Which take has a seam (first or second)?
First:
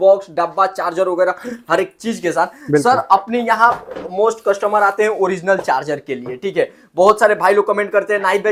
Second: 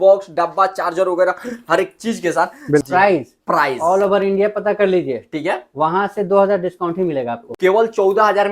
second